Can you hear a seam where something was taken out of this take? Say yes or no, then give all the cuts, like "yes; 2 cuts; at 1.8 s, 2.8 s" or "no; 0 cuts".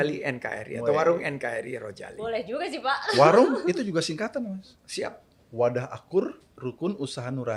no; 0 cuts